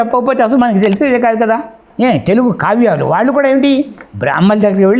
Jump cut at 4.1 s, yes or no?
no